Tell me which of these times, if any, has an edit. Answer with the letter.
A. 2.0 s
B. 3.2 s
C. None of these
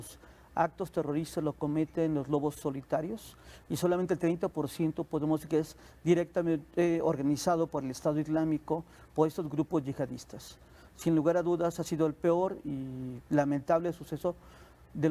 C